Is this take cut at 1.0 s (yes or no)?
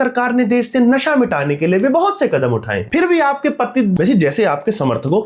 no